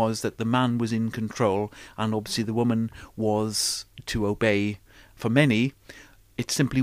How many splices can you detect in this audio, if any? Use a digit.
1